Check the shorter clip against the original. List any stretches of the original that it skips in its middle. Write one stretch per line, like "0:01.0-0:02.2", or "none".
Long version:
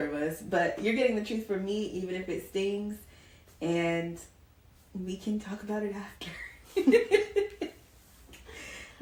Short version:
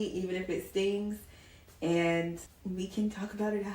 0:04.3-0:04.8